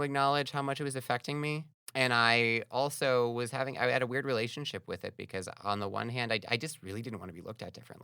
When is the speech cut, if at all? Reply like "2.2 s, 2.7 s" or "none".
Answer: 1.7 s